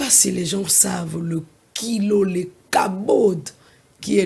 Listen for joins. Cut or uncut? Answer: uncut